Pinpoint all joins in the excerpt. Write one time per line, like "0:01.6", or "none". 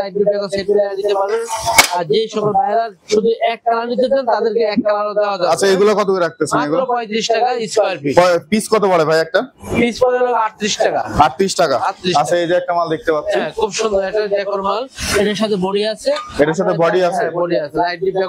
none